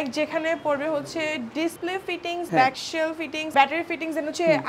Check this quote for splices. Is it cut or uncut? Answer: cut